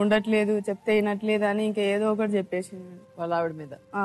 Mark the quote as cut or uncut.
uncut